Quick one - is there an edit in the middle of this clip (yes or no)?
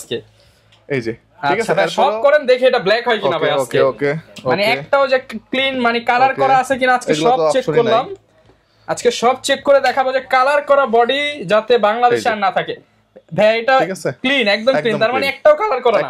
no